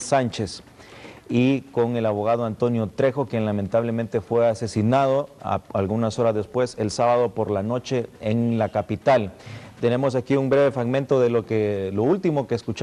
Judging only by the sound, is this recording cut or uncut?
uncut